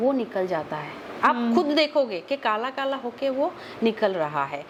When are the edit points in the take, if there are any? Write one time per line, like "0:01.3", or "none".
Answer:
none